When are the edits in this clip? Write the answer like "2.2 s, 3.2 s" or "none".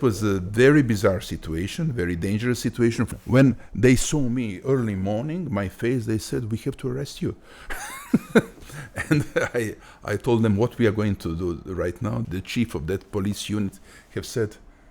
3.1 s, 12.2 s

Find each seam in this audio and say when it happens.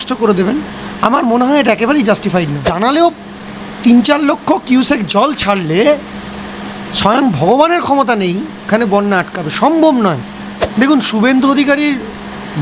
2.7 s, 10.6 s

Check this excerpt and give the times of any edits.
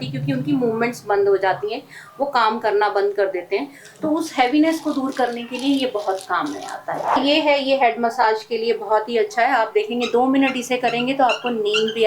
7.2 s

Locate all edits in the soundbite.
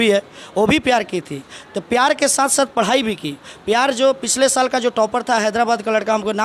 none

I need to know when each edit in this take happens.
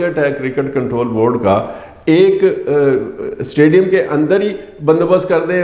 none

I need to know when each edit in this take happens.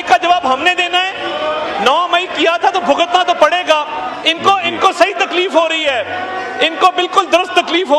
none

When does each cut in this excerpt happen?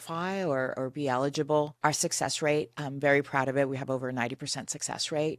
1.7 s

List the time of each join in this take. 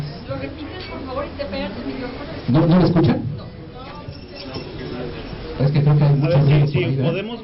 none

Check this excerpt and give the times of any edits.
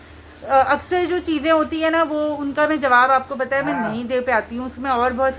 none

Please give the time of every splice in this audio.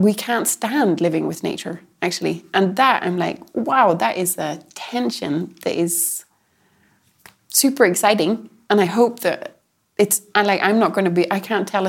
none

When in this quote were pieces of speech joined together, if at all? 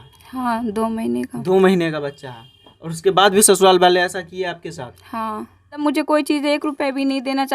5.8 s

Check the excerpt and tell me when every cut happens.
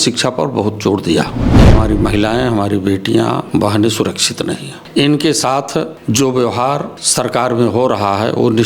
1.7 s, 3.4 s, 4.7 s, 6.0 s, 7.0 s

